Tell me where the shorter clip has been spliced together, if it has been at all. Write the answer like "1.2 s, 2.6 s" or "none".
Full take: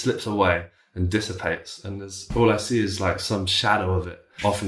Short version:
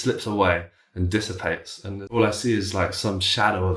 2.2 s